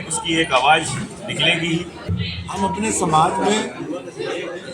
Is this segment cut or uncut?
cut